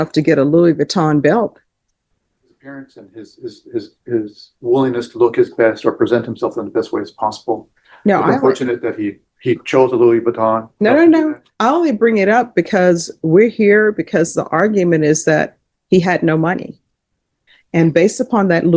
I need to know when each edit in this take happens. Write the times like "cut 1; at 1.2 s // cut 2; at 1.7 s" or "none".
cut 1; at 2.6 s

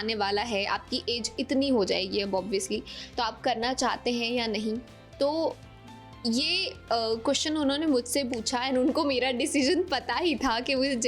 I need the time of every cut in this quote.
none

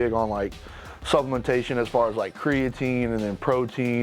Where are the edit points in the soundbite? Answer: none

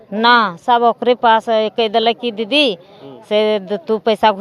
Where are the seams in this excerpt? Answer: none

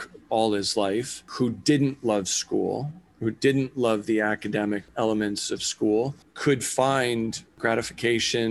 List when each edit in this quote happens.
cut 1; at 1.2 s // cut 2; at 4.9 s // cut 3; at 6.2 s // cut 4; at 7.6 s

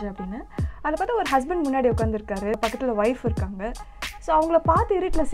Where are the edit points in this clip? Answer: cut 1; at 2.6 s

